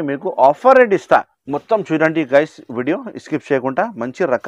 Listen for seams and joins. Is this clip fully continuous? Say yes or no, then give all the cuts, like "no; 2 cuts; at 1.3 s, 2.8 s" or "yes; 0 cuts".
no; 1 cut; at 1.4 s